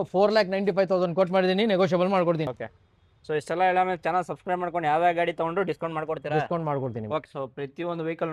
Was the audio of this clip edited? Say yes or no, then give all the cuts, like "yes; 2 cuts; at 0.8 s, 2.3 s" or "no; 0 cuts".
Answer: yes; 2 cuts; at 2.6 s, 7.3 s